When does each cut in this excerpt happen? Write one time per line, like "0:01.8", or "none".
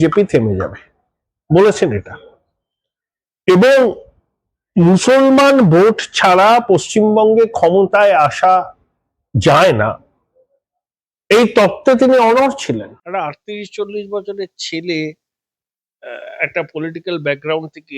0:13.0

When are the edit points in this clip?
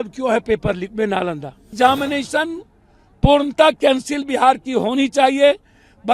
0:01.7

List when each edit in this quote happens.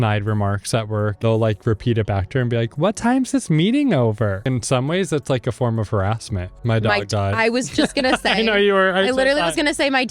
0:01.2
0:04.4
0:06.6

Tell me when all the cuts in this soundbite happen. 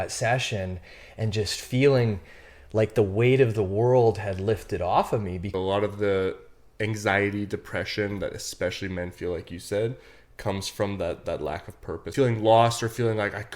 0:05.5
0:12.1

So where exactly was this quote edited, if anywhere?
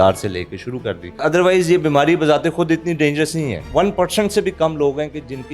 0:01.2
0:03.6

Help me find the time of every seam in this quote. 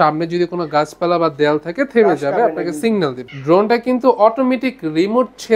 0:03.3

